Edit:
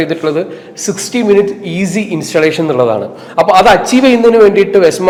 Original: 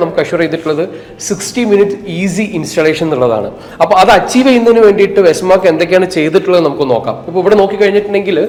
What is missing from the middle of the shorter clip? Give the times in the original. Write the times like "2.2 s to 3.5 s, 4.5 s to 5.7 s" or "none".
none